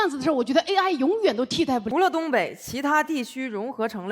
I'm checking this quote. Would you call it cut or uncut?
cut